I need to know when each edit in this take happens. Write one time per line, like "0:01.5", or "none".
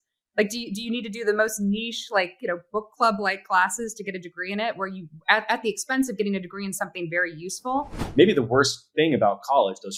0:08.0

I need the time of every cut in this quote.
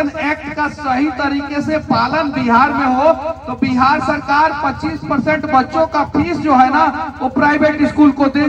none

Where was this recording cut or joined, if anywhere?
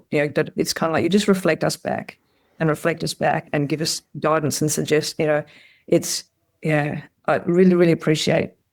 0:03.5

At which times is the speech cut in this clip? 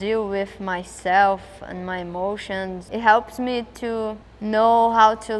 0:02.8

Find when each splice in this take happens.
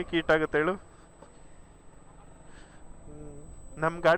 none

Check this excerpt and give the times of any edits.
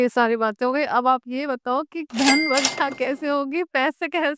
none

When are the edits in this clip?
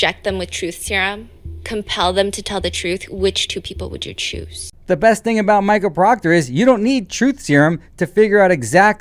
0:04.7

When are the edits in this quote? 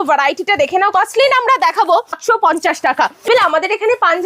0:00.9
0:02.2
0:03.3

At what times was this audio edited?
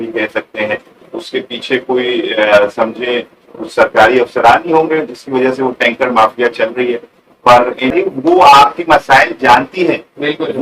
0:07.9

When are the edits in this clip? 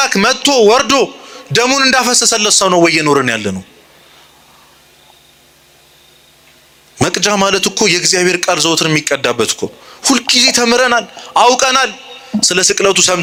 none

